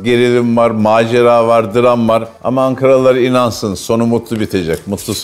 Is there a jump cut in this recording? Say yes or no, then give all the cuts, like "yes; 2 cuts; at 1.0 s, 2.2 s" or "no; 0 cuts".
no; 0 cuts